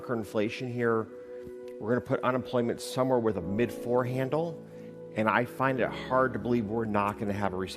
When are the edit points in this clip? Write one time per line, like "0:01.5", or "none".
none